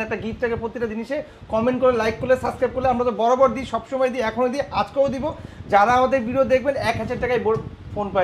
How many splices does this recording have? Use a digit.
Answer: 0